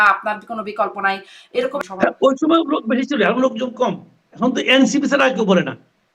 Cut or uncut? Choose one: cut